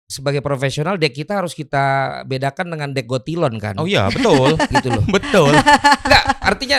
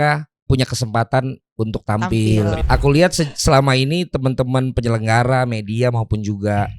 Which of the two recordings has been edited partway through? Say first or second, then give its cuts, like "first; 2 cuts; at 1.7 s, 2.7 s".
second; 1 cut; at 2.6 s